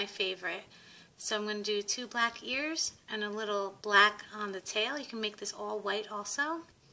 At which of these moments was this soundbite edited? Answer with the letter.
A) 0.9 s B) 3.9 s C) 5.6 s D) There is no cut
B